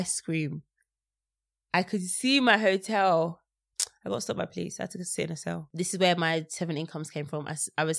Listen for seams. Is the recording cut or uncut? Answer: cut